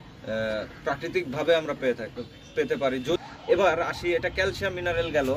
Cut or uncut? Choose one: cut